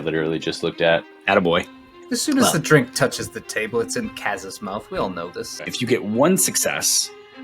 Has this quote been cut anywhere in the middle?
yes; 2 cuts; at 1.7 s, 5.7 s

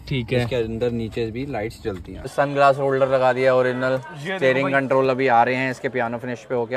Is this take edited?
yes; 1 cut; at 2.3 s

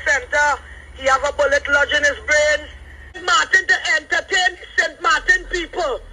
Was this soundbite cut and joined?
yes; 1 cut; at 3.2 s

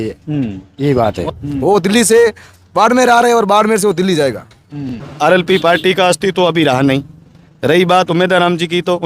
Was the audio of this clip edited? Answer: yes; 2 cuts; at 1.3 s, 5.0 s

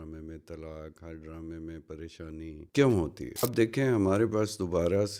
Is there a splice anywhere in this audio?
yes; 2 cuts; at 2.6 s, 3.4 s

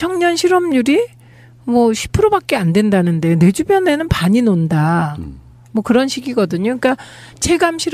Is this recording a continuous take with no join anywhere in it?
no; 1 cut; at 6.7 s

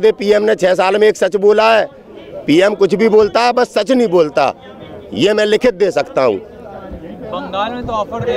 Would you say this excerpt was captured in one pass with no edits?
yes; 0 cuts

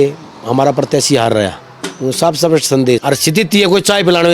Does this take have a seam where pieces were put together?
yes; 1 cut; at 3.0 s

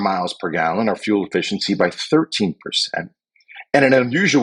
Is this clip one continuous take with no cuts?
yes; 0 cuts

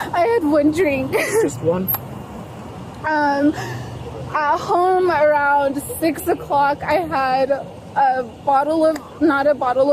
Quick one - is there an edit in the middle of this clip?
no; 0 cuts

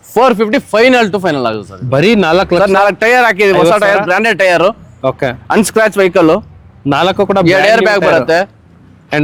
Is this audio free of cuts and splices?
yes; 0 cuts

